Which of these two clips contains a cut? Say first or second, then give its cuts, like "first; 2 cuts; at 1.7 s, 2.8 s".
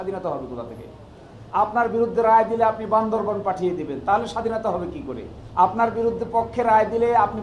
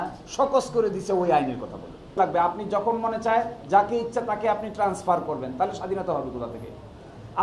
second; 1 cut; at 2.2 s